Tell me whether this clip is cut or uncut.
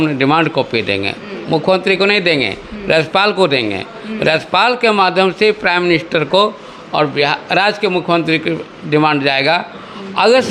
uncut